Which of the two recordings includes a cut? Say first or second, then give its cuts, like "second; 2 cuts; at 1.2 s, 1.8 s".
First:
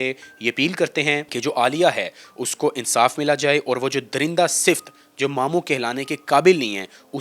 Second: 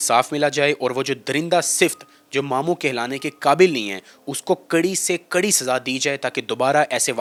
first; 1 cut; at 1.3 s